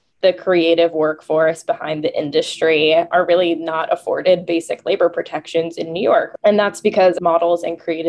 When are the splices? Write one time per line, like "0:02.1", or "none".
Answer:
0:06.3
0:07.2